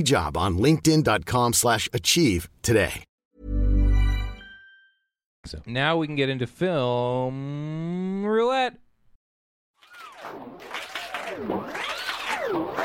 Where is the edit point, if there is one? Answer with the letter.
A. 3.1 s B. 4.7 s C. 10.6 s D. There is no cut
D